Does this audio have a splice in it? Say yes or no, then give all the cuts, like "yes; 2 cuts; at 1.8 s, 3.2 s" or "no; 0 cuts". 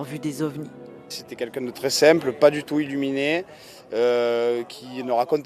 yes; 1 cut; at 4.5 s